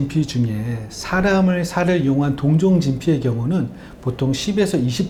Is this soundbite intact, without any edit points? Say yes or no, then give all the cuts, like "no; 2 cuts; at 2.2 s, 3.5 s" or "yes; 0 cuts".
yes; 0 cuts